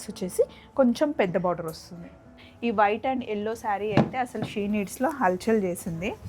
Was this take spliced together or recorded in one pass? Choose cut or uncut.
cut